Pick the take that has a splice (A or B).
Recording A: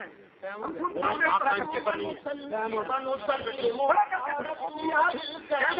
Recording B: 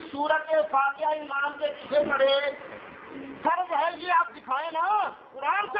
B